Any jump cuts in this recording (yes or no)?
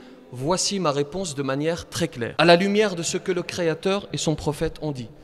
no